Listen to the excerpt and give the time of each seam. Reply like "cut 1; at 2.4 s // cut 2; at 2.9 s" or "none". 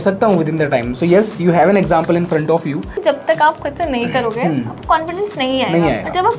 cut 1; at 2.9 s